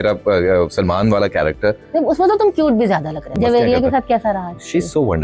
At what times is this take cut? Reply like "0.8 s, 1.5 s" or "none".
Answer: 3.3 s